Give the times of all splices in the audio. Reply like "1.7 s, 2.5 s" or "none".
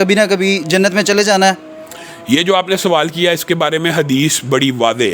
none